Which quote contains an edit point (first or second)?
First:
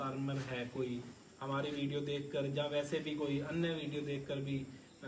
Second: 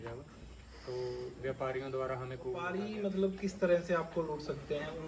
second